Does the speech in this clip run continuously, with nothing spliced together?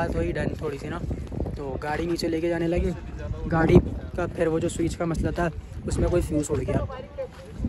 yes; 0 cuts

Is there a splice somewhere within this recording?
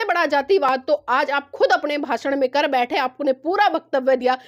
no; 0 cuts

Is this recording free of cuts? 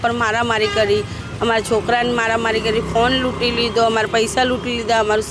yes; 0 cuts

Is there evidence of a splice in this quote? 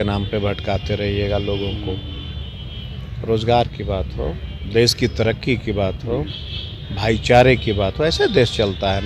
no; 0 cuts

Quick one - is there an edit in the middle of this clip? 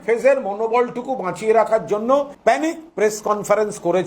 yes; 1 cut; at 2.3 s

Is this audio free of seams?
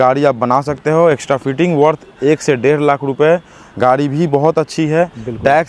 yes; 0 cuts

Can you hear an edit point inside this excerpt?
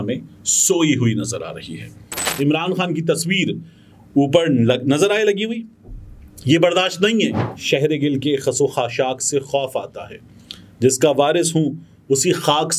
yes; 2 cuts; at 2.3 s, 7.5 s

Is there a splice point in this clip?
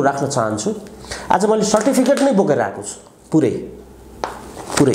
no; 0 cuts

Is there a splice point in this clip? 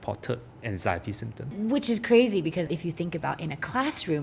yes; 2 cuts; at 1.5 s, 2.7 s

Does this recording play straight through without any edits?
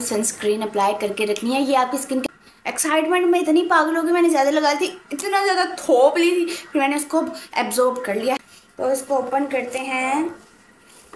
no; 2 cuts; at 2.2 s, 8.4 s

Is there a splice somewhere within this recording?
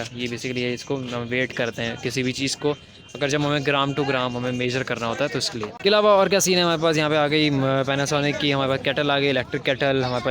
yes; 1 cut; at 5.8 s

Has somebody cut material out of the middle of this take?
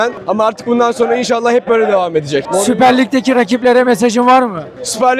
yes; 1 cut; at 2.4 s

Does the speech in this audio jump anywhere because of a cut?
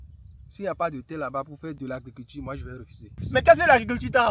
yes; 2 cuts; at 1.8 s, 3.1 s

